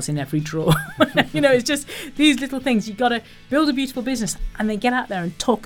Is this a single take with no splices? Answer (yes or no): yes